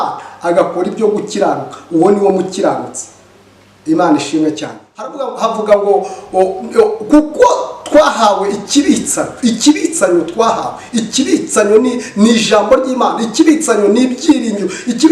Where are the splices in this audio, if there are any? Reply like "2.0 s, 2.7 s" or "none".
5.1 s